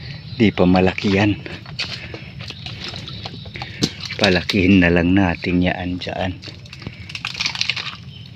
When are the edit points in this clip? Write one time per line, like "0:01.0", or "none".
none